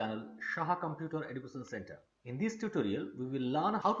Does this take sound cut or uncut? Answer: uncut